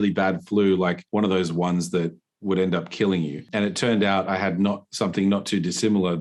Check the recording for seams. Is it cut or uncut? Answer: cut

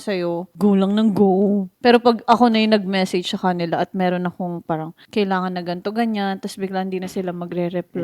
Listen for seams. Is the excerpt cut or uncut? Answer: uncut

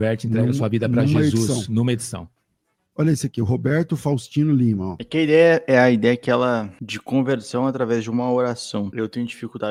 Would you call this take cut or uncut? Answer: uncut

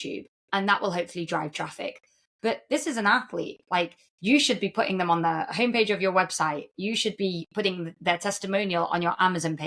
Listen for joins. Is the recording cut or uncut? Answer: uncut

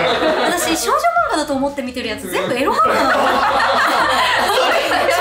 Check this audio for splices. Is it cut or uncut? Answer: uncut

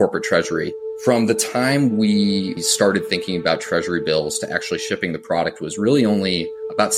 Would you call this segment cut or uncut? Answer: cut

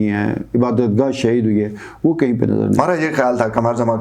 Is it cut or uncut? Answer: cut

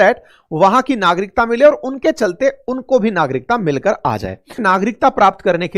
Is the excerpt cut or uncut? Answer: cut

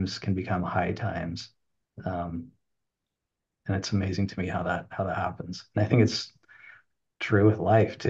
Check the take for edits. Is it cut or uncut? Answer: uncut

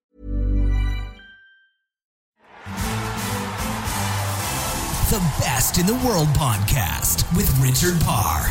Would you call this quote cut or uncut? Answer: cut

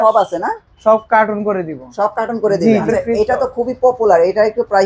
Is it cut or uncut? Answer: cut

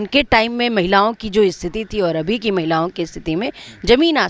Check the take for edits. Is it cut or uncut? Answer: uncut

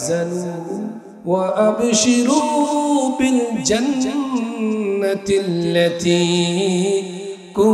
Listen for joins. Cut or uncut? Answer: cut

